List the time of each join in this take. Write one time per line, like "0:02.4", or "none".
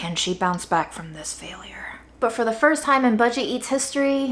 0:02.2